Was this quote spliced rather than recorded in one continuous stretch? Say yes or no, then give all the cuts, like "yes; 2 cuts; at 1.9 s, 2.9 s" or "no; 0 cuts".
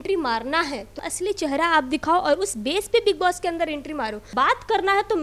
yes; 2 cuts; at 1.0 s, 4.3 s